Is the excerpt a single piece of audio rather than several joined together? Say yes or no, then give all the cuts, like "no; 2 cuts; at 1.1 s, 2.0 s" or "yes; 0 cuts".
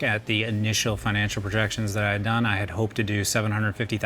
yes; 0 cuts